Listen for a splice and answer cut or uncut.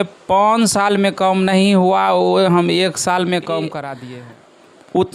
cut